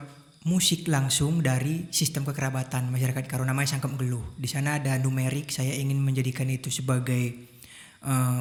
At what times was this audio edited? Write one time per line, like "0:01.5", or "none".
none